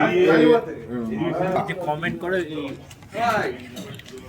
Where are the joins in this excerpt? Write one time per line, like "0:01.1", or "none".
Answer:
0:01.6